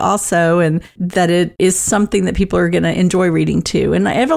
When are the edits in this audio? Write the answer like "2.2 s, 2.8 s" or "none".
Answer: none